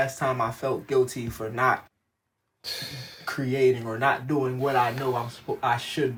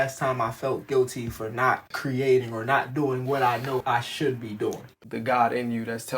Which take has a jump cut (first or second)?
second